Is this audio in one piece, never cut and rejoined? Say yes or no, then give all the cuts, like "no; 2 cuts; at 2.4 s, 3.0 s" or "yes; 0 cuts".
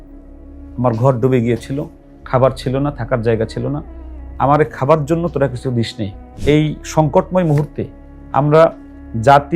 no; 1 cut; at 6.2 s